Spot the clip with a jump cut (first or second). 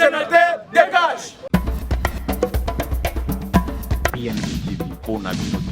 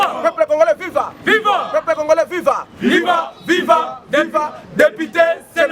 first